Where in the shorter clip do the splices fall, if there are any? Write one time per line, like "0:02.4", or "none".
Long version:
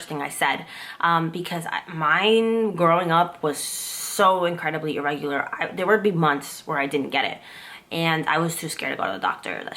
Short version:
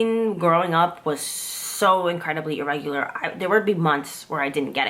none